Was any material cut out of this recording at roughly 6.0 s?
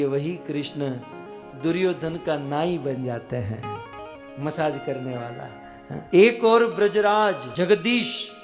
yes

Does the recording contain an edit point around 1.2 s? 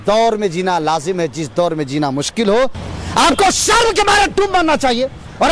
no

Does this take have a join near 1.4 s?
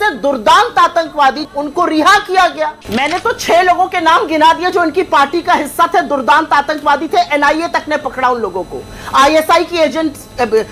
yes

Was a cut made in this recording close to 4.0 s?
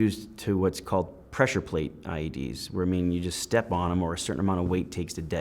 no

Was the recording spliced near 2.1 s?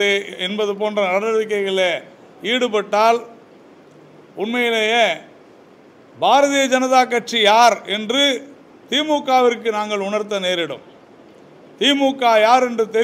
no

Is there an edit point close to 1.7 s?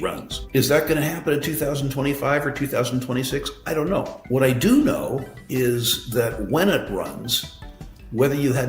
no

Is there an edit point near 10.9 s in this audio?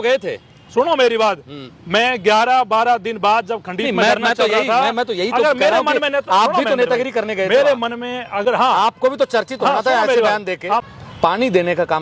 yes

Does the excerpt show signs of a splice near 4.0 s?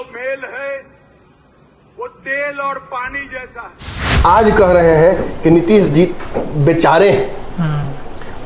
yes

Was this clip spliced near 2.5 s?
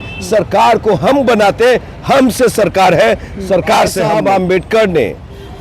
no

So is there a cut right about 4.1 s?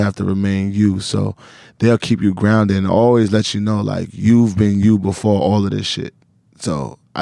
no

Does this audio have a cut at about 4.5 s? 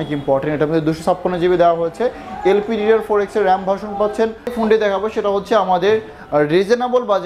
yes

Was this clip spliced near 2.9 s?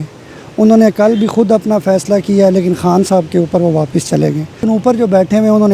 no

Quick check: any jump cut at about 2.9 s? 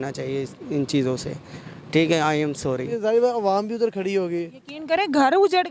yes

